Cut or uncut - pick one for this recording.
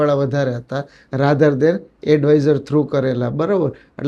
uncut